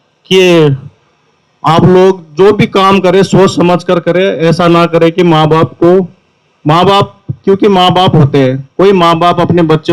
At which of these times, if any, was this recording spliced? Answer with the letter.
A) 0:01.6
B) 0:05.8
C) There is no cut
C